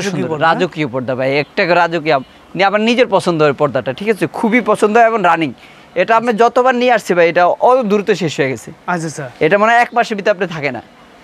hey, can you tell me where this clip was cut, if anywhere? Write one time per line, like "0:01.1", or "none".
none